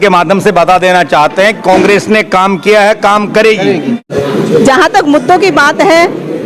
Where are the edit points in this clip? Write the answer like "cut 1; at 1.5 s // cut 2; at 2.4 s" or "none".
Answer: cut 1; at 4.1 s